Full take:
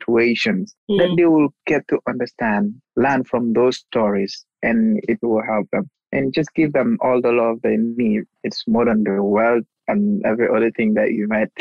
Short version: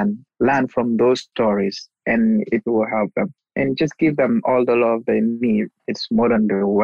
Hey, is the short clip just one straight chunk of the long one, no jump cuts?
yes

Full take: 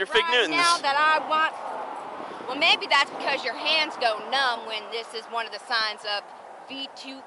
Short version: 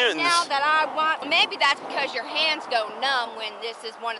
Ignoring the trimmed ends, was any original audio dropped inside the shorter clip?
yes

